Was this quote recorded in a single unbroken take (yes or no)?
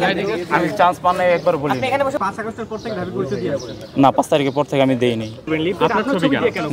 no